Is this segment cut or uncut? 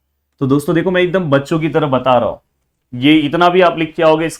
uncut